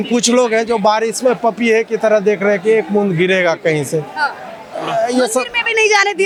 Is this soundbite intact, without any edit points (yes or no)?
yes